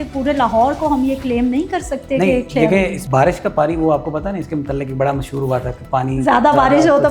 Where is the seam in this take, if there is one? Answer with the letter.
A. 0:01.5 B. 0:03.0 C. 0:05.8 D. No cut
B